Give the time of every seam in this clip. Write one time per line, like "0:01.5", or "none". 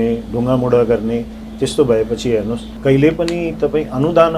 0:02.6